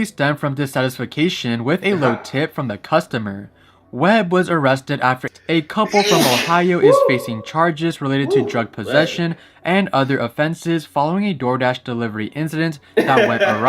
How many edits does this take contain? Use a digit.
1